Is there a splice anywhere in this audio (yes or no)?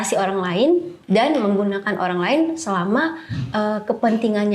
no